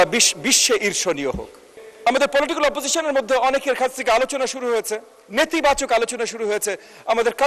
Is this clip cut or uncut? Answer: cut